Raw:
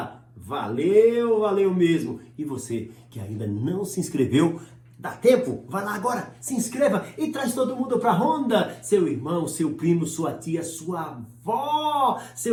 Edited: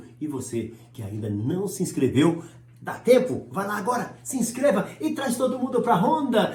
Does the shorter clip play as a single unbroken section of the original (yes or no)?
yes